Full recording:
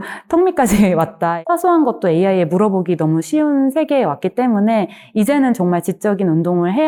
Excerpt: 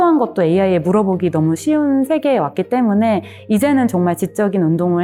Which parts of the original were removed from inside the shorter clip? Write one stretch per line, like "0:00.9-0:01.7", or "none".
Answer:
none